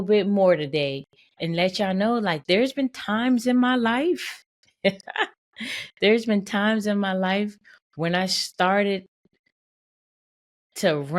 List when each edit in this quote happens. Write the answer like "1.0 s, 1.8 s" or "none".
1.3 s, 2.4 s